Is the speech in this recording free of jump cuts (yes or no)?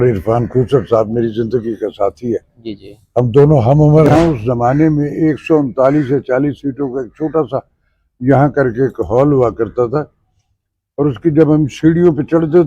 no